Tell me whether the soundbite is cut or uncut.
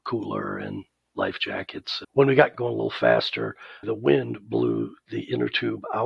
cut